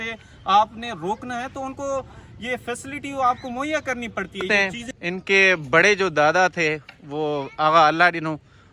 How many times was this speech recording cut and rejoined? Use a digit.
1